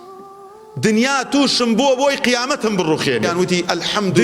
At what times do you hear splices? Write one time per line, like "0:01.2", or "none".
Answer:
0:03.3